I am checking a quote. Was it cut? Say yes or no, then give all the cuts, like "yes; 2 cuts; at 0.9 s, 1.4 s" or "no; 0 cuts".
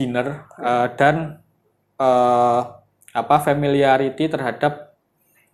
no; 0 cuts